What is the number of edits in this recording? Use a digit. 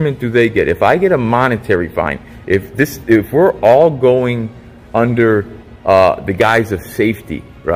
0